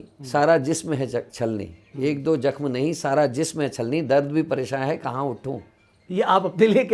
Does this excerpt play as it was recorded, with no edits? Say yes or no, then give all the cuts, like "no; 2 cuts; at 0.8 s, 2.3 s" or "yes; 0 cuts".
yes; 0 cuts